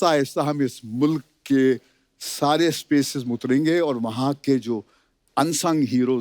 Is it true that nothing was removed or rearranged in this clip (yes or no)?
yes